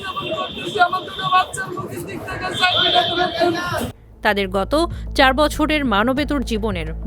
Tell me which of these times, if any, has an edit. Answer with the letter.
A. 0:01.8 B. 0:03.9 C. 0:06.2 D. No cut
D